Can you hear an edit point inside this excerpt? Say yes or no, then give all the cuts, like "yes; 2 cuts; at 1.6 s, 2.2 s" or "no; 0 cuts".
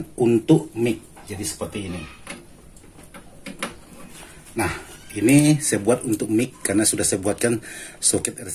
no; 0 cuts